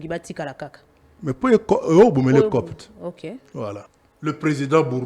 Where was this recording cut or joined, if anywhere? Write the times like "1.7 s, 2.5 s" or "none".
4.0 s